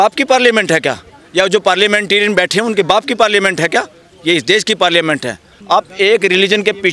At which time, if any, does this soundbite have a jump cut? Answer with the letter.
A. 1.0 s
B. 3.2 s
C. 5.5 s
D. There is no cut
C